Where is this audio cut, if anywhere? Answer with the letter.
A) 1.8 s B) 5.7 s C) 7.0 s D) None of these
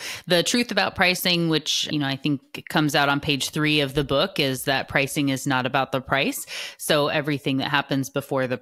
A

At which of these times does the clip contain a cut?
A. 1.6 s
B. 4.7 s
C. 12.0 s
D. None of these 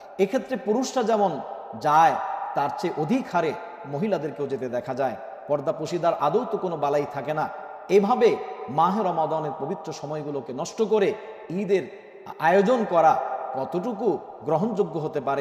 D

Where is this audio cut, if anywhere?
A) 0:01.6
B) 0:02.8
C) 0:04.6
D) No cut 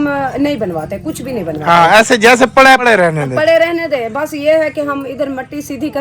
B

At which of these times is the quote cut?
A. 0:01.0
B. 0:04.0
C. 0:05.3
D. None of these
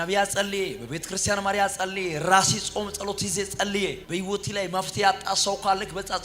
B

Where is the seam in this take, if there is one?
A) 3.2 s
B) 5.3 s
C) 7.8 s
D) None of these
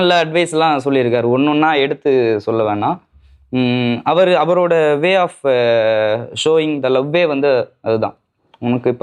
D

